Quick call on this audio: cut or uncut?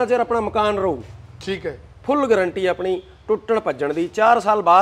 uncut